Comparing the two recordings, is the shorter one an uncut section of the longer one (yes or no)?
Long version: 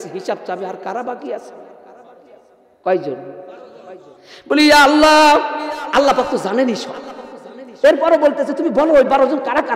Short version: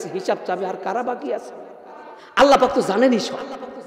no